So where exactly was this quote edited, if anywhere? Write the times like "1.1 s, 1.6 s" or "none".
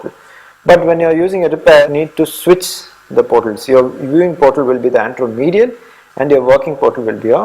1.9 s

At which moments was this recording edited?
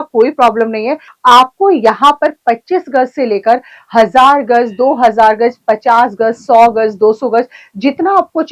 1.0 s

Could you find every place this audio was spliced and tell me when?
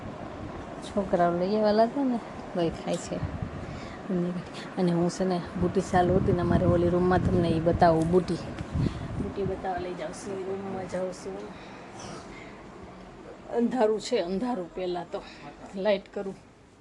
none

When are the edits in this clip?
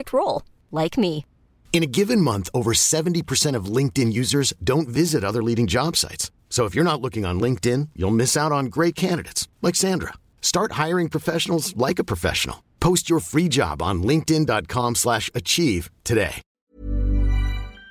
16.6 s

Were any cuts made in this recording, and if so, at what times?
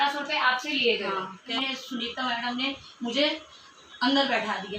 1.5 s

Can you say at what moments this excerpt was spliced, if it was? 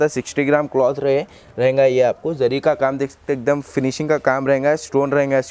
none

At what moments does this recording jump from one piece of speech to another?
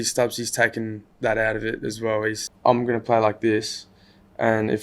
1.0 s, 2.4 s

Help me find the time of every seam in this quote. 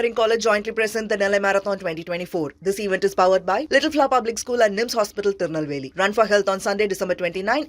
none

